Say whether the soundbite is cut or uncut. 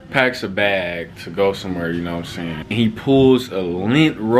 cut